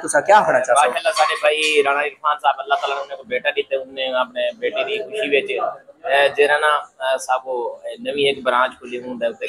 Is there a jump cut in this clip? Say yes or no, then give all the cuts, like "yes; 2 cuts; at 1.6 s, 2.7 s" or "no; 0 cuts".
no; 0 cuts